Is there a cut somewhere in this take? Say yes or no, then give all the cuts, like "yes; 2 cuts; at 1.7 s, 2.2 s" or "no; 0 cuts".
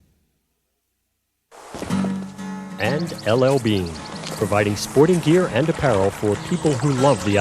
yes; 1 cut; at 2.8 s